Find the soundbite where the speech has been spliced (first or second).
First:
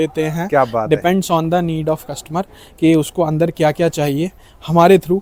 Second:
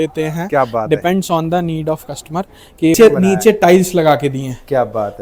second